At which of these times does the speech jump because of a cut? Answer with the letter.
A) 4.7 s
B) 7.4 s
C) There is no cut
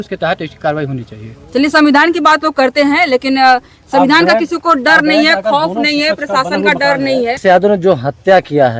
B